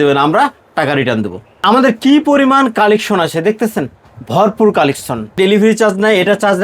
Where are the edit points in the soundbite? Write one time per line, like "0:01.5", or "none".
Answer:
0:05.4